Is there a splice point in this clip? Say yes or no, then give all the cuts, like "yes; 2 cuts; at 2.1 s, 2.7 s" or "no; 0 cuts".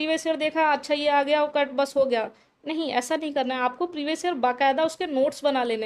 no; 0 cuts